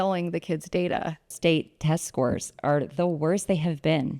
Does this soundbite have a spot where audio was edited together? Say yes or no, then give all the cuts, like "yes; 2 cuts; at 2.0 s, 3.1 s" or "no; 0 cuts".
yes; 1 cut; at 1.3 s